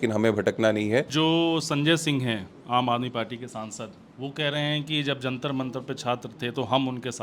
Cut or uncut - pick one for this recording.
cut